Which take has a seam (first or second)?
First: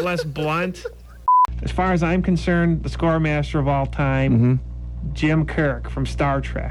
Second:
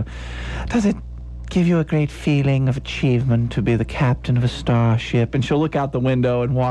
first